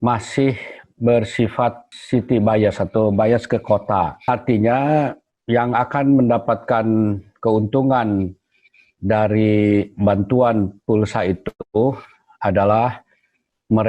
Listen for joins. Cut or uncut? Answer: cut